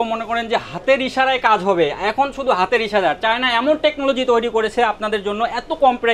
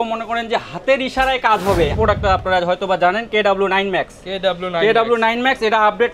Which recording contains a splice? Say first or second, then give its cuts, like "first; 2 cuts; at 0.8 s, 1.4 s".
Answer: second; 1 cut; at 1.9 s